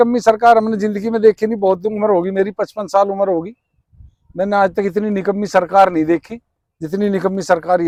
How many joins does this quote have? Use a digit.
0